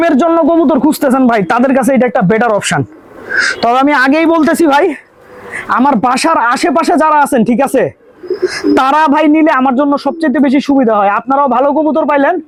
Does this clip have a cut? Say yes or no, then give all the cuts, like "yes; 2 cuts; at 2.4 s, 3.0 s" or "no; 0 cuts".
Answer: no; 0 cuts